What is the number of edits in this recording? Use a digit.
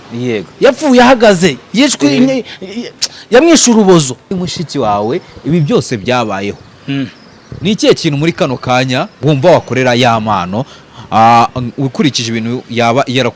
2